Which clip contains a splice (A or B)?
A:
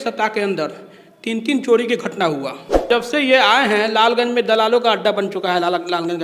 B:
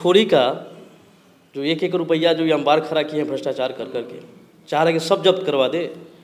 A